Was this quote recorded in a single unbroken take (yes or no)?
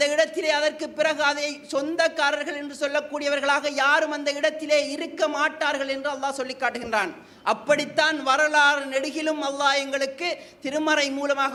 yes